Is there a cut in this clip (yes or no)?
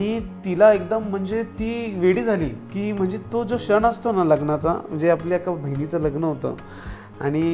no